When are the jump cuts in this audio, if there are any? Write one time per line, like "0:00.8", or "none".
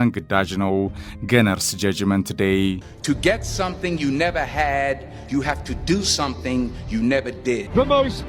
0:02.9